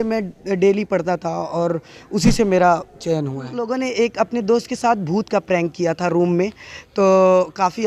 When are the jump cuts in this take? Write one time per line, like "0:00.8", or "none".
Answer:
0:03.5